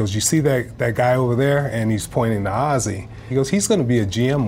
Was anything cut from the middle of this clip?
yes; 1 cut; at 3.3 s

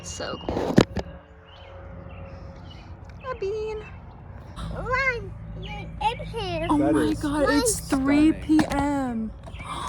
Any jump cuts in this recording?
yes; 1 cut; at 4.6 s

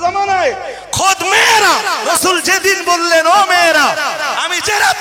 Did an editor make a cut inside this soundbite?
yes; 1 cut; at 2.1 s

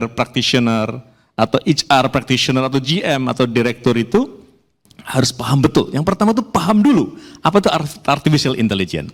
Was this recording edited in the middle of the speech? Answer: no; 0 cuts

